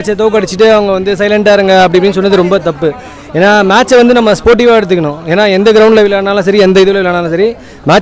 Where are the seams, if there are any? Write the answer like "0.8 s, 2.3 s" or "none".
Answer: none